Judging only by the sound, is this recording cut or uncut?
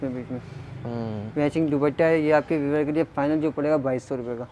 uncut